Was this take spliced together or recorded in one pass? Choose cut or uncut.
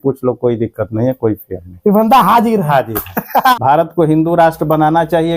cut